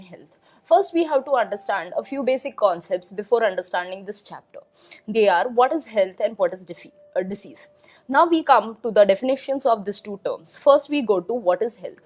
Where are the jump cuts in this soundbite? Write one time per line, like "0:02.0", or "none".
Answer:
0:02.2